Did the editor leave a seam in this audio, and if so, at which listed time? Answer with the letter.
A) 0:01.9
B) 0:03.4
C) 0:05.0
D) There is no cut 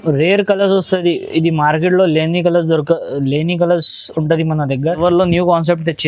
C